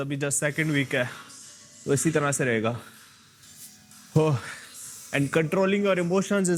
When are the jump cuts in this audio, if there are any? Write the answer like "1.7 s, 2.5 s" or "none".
none